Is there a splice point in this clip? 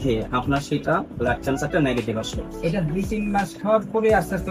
no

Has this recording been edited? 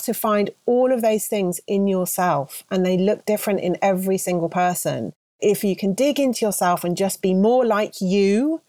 yes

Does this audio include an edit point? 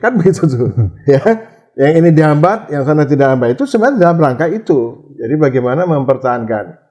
no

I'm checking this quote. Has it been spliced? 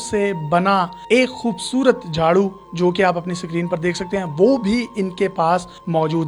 no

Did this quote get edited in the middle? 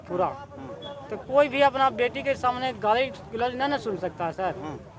no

